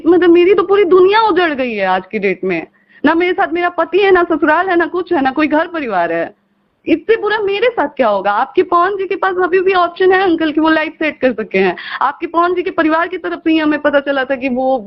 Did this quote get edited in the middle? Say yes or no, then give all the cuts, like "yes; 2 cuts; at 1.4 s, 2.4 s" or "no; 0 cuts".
no; 0 cuts